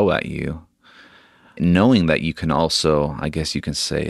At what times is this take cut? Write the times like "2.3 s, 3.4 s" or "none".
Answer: 1.5 s